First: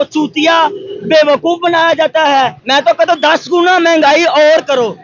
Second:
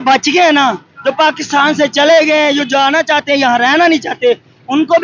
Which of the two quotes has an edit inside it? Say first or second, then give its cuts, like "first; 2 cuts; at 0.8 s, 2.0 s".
first; 1 cut; at 2.6 s